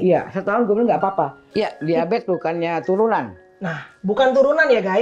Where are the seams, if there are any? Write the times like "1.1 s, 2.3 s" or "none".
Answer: 1.4 s

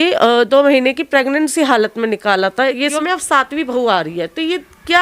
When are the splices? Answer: 2.9 s

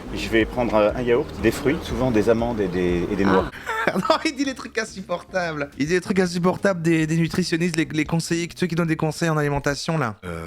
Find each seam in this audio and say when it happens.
3.6 s

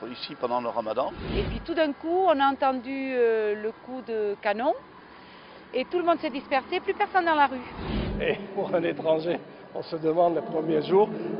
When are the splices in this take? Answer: 1.2 s, 7.9 s

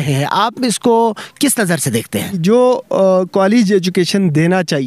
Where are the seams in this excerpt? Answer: 2.4 s

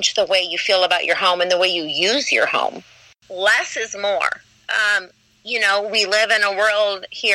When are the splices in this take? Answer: 3.1 s

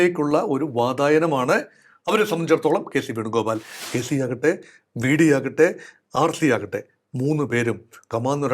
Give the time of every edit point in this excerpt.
3.7 s

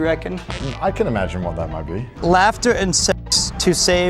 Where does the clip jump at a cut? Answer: 2.1 s

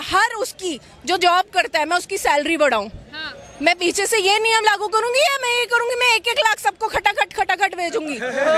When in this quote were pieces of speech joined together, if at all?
none

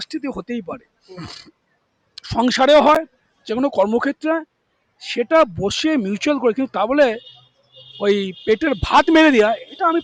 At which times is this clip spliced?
none

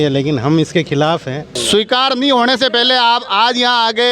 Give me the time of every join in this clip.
1.6 s

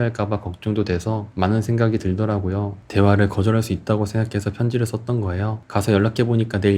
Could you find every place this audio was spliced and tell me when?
2.8 s

